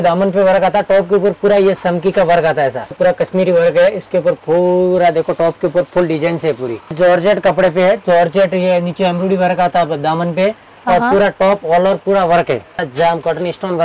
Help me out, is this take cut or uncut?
cut